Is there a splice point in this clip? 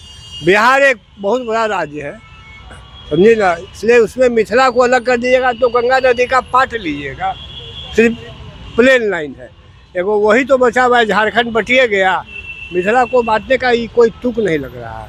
no; 0 cuts

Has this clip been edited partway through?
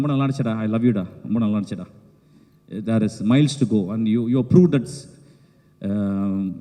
no; 0 cuts

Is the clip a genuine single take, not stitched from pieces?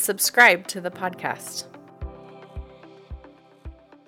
no; 1 cut; at 1.4 s

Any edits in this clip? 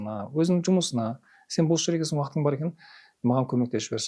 no; 0 cuts

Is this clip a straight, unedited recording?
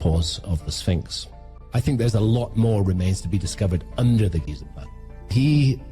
no; 2 cuts; at 1.4 s, 4.9 s

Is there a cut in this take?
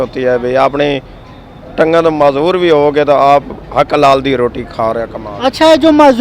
no; 0 cuts

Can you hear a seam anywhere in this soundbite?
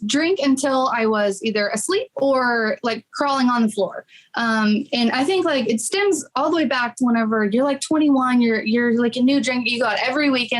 no; 0 cuts

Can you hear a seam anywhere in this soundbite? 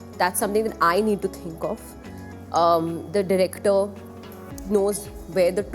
no; 0 cuts

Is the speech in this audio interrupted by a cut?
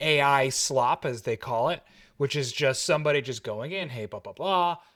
no; 0 cuts

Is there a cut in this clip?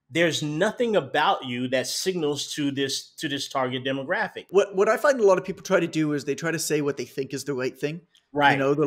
yes; 1 cut; at 4.4 s

